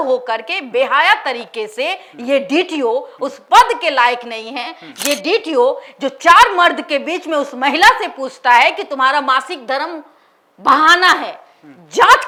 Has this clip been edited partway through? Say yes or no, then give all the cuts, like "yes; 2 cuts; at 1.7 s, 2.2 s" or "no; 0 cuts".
no; 0 cuts